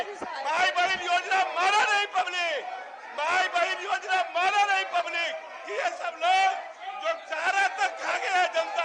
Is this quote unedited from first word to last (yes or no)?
yes